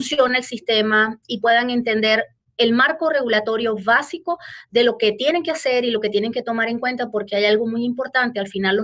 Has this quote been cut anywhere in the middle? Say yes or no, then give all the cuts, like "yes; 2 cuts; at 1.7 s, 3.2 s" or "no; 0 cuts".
yes; 1 cut; at 3.3 s